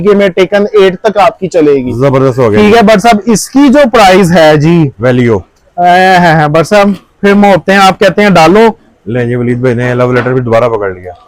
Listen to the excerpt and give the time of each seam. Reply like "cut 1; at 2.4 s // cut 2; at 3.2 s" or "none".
none